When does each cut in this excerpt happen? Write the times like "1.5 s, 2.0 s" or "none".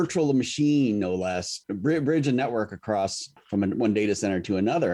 1.6 s, 3.3 s